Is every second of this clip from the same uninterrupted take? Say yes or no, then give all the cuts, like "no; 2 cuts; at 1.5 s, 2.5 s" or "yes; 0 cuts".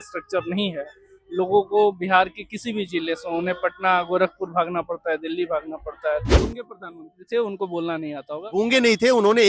no; 1 cut; at 6.3 s